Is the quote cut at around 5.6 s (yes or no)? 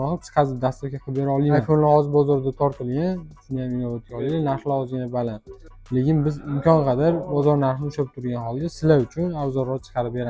no